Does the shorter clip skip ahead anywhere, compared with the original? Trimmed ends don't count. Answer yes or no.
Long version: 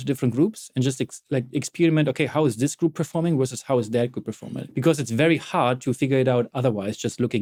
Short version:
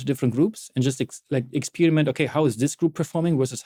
no